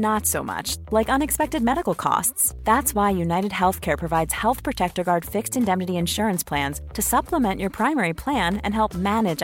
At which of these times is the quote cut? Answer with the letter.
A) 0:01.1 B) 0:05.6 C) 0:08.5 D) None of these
D